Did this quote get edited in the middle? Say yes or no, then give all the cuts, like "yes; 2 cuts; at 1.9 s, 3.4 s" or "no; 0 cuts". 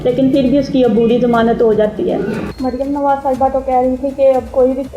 yes; 1 cut; at 2.5 s